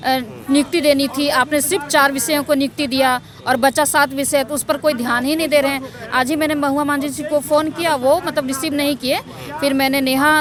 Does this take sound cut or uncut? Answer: uncut